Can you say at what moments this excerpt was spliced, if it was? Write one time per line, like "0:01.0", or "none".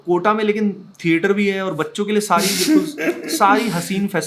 none